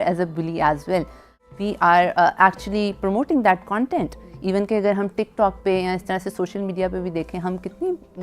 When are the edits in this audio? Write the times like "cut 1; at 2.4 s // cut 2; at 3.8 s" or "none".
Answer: cut 1; at 1.3 s